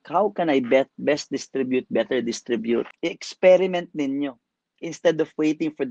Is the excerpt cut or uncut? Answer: cut